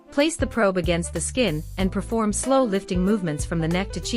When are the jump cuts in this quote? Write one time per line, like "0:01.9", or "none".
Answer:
0:01.7